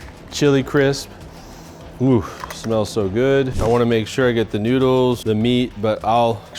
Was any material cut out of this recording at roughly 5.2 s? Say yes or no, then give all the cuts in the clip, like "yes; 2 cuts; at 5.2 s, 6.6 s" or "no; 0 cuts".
yes; 2 cuts; at 3.5 s, 5.2 s